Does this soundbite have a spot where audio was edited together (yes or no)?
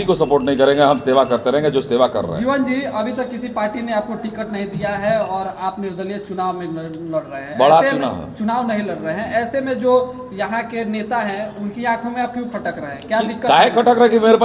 no